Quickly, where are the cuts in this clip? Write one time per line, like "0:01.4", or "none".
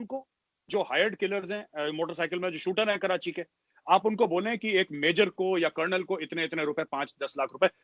none